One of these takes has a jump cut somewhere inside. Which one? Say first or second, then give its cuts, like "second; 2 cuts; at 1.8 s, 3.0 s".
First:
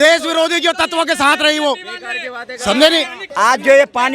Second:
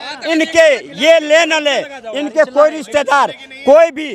first; 1 cut; at 3.2 s